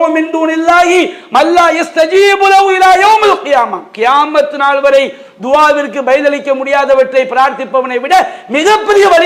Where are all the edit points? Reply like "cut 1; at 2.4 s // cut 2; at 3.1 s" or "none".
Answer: none